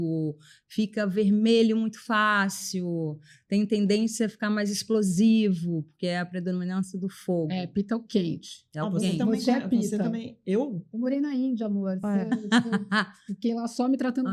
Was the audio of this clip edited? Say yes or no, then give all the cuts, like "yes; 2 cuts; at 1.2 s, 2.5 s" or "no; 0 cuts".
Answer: no; 0 cuts